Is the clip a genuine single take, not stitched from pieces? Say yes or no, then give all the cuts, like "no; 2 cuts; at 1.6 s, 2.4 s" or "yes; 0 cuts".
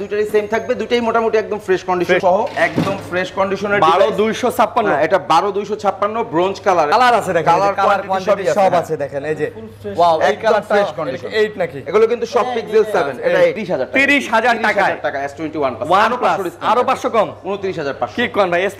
no; 3 cuts; at 2.2 s, 6.9 s, 13.6 s